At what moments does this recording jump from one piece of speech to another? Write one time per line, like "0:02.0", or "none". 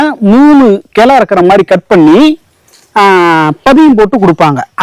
none